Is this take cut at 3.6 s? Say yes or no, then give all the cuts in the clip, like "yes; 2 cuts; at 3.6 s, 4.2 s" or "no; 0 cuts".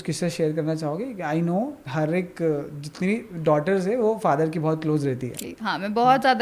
no; 1 cut; at 5.3 s